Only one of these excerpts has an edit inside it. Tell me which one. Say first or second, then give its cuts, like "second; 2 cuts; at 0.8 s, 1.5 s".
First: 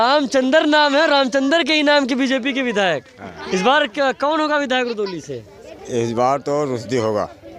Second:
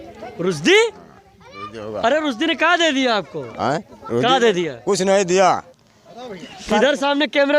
second; 1 cut; at 5.7 s